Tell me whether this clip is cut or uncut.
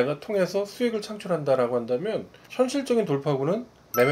uncut